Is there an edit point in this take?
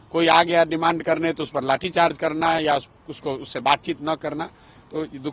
no; 0 cuts

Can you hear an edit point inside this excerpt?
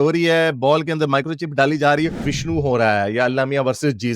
yes; 1 cut; at 2.1 s

